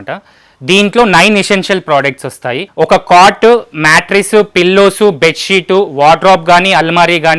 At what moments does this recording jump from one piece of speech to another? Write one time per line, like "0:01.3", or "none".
0:02.6